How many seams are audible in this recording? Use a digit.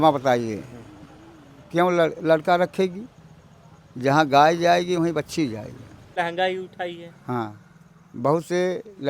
1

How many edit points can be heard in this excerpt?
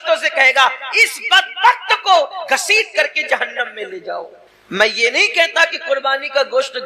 0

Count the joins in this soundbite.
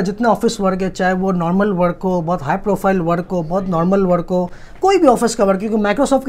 0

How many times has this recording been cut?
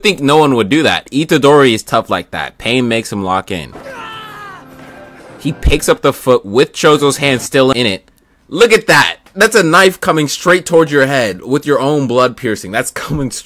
1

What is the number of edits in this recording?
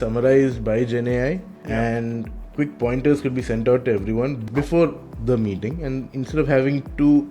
1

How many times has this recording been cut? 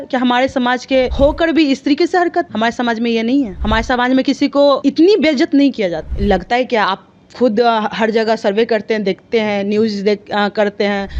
5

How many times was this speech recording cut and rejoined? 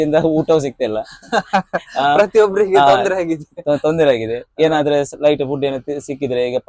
0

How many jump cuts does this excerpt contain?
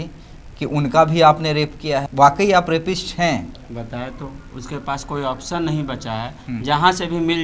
0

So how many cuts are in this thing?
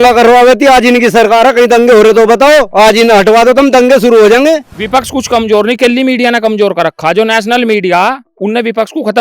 1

